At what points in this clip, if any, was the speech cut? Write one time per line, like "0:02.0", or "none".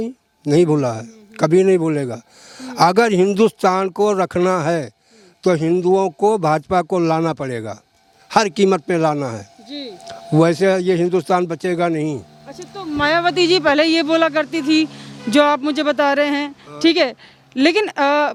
none